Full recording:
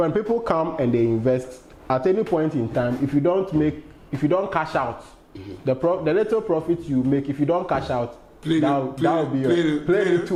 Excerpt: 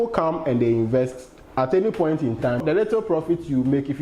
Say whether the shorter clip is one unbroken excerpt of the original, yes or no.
no